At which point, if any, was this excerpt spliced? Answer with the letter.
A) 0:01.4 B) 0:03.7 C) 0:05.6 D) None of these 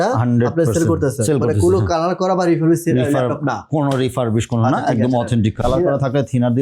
C